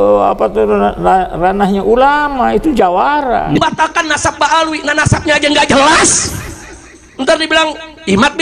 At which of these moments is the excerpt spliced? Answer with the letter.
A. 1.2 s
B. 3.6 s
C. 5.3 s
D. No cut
B